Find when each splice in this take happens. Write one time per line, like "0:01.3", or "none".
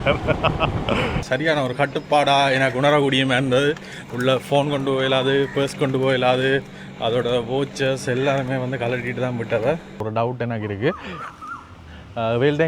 0:01.2
0:10.0

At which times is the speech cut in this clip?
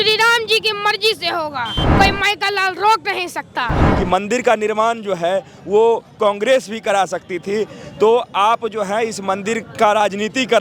0:01.8
0:03.8

